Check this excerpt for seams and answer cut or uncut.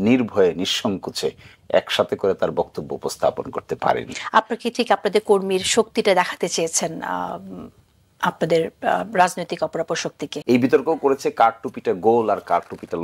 cut